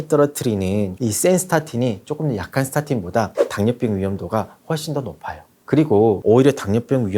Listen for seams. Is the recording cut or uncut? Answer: cut